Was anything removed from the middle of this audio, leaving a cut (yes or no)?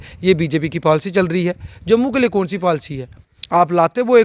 no